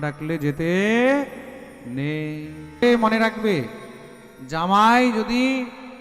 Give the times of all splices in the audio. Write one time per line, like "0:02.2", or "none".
0:02.8